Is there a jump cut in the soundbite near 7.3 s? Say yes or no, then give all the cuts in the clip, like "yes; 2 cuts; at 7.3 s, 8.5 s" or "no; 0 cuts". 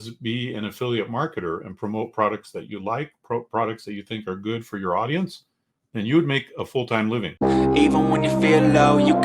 yes; 1 cut; at 7.3 s